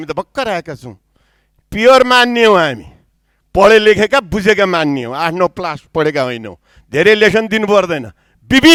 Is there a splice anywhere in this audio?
no; 0 cuts

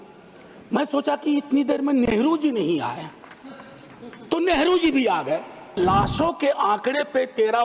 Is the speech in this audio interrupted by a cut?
yes; 1 cut; at 5.8 s

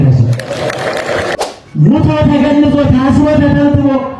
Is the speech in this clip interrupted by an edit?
yes; 1 cut; at 1.4 s

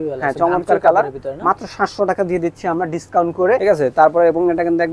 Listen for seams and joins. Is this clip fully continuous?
no; 1 cut; at 3.6 s

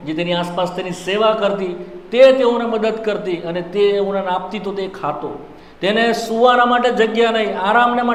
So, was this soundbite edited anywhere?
no; 0 cuts

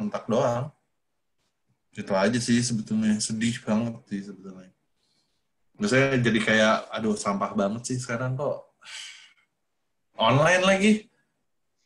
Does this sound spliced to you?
no; 0 cuts

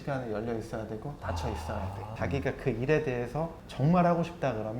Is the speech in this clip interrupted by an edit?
yes; 2 cuts; at 2.0 s, 3.6 s

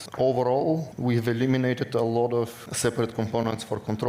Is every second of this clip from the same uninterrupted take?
no; 2 cuts; at 0.9 s, 2.6 s

